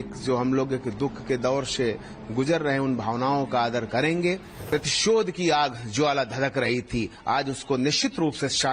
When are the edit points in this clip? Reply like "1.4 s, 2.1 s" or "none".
4.5 s